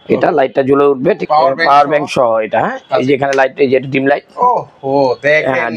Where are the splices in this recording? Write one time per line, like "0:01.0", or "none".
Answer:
0:01.2